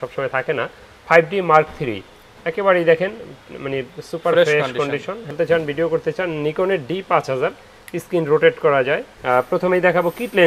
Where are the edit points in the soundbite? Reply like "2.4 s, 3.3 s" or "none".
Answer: 5.3 s, 9.1 s